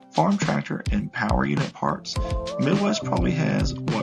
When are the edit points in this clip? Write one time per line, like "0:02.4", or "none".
none